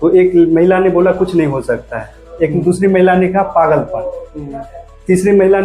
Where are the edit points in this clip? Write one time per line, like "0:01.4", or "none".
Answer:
none